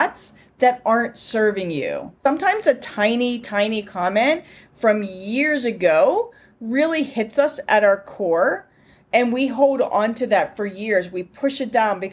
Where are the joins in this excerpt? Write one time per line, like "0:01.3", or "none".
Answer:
0:02.3